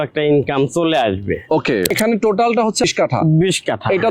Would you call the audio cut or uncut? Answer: cut